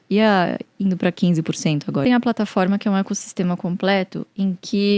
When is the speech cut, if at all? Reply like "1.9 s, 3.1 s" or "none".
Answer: 2.0 s